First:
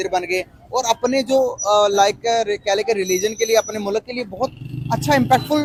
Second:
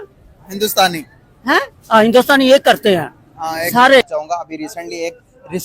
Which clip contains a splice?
second; 1 cut; at 4.0 s

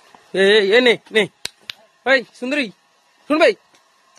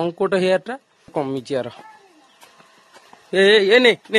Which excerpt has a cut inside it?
second; 1 cut; at 1.1 s

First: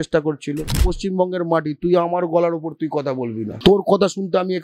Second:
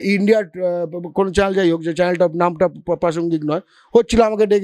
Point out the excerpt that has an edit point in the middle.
first; 2 cuts; at 0.9 s, 3.5 s

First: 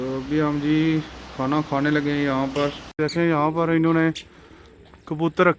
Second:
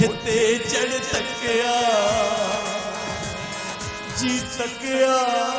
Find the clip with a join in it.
first; 1 cut; at 3.0 s

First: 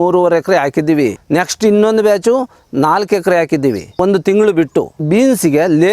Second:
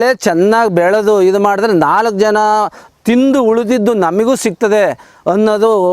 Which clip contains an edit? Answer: first; 3 cuts; at 1.2 s, 4.0 s, 5.0 s

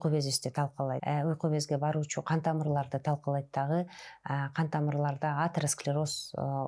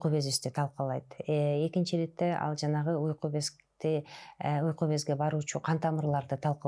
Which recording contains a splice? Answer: first; 1 cut; at 1.0 s

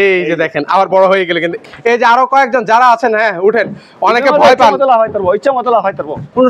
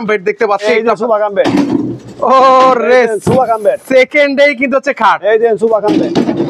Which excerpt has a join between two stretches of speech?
first; 1 cut; at 1.6 s

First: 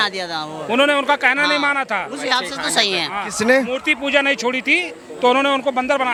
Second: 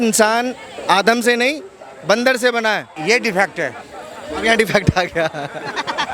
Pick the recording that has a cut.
second; 1 cut; at 2.9 s

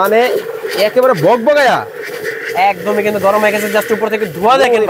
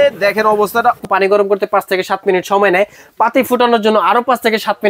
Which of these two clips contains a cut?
second; 1 cut; at 1.0 s

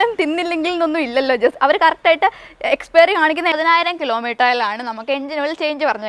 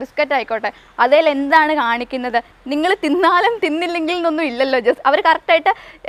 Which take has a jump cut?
first; 1 cut; at 3.6 s

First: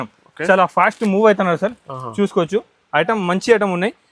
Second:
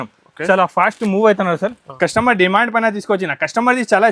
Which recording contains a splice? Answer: second; 1 cut; at 1.8 s

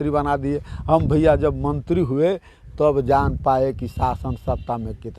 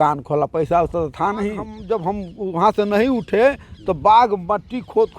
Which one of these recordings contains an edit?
second; 1 cut; at 1.7 s

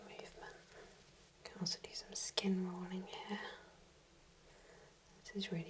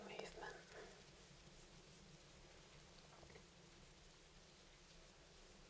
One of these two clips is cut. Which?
first; 1 cut; at 1.2 s

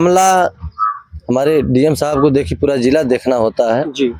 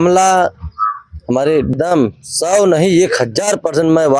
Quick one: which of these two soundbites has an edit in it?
second; 1 cut; at 1.7 s

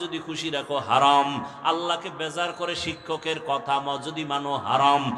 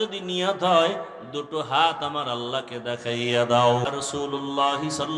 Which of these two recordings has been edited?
second; 1 cut; at 3.9 s

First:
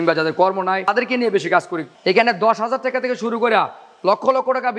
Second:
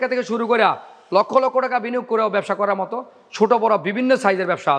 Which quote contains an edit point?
first; 2 cuts; at 0.9 s, 1.9 s

